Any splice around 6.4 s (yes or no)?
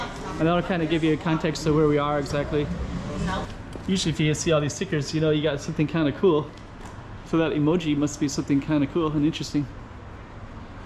no